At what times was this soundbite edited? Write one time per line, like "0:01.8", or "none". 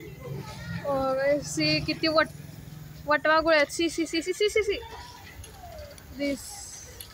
none